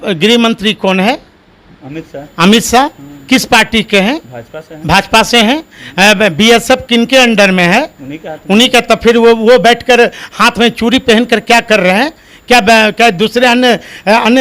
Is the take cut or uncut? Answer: uncut